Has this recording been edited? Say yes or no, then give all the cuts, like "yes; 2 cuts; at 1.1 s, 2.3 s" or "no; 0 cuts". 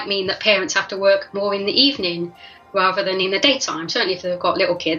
no; 0 cuts